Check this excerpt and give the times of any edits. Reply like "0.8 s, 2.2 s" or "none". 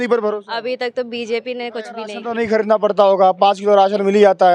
2.2 s